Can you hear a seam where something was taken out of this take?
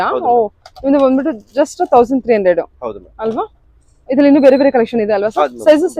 no; 0 cuts

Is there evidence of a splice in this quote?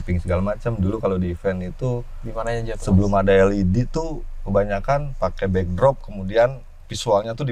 no; 0 cuts

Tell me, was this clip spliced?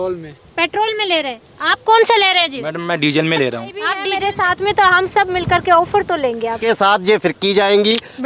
yes; 2 cuts; at 4.0 s, 6.6 s

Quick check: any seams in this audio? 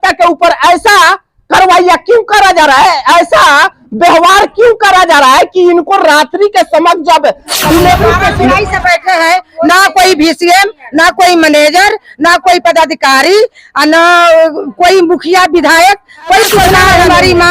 yes; 2 cuts; at 8.3 s, 16.7 s

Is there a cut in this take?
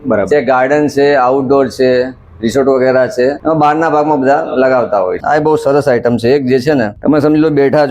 yes; 3 cuts; at 3.4 s, 5.2 s, 6.9 s

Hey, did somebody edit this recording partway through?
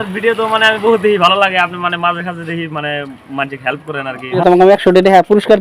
yes; 1 cut; at 4.4 s

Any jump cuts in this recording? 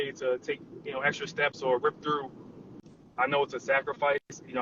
yes; 1 cut; at 2.7 s

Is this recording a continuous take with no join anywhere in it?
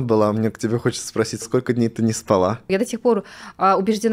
no; 2 cuts; at 1.4 s, 2.7 s

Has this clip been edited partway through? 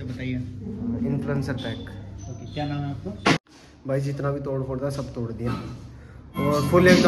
yes; 1 cut; at 3.3 s

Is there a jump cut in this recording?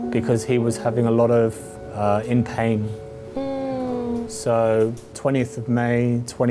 no; 0 cuts

